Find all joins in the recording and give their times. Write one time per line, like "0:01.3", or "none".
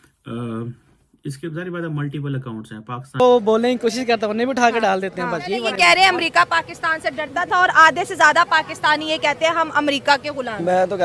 0:03.2